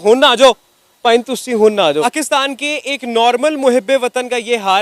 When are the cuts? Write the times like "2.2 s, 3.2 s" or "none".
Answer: 2.0 s